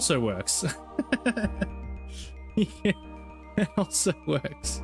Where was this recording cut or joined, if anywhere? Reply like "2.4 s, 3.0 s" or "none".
none

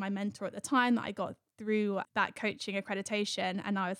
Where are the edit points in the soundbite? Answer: 2.3 s

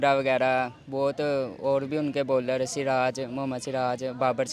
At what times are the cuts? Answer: none

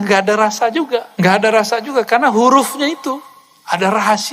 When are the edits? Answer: 1.1 s

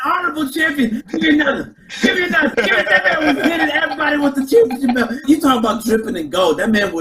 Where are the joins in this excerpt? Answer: 1.0 s, 2.5 s, 5.2 s

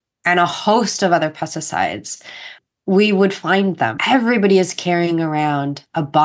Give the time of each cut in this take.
2.6 s, 4.0 s

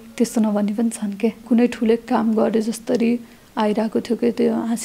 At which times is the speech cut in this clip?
1.4 s

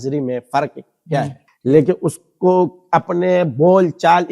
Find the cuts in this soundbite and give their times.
1.4 s

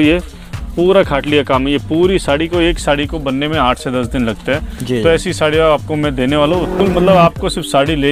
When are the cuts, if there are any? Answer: 6.8 s

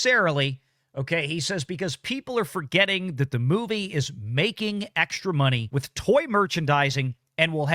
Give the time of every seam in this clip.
5.6 s

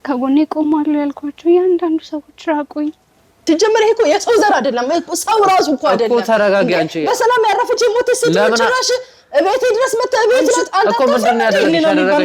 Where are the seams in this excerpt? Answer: 3.4 s

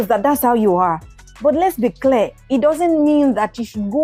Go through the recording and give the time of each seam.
none

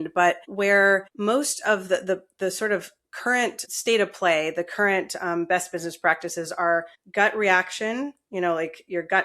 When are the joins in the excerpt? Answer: 0.8 s, 3.6 s, 7.0 s

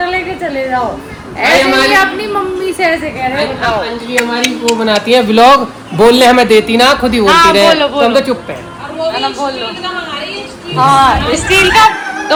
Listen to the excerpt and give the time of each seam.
none

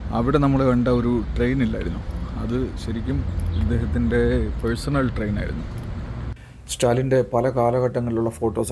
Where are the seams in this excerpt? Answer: 6.4 s

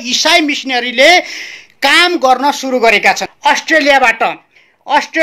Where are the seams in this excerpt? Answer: 3.3 s

